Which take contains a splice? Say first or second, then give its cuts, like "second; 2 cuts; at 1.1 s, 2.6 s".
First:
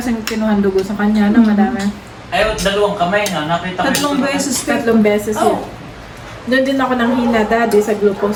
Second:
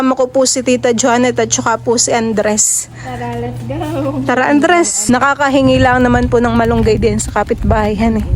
second; 1 cut; at 5.0 s